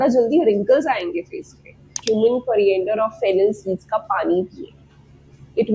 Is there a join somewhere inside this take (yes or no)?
yes